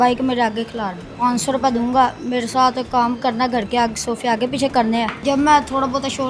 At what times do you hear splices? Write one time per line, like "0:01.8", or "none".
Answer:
0:01.1
0:05.2